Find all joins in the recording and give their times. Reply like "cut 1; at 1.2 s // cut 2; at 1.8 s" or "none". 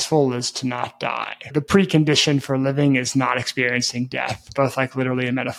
cut 1; at 1.5 s // cut 2; at 4.4 s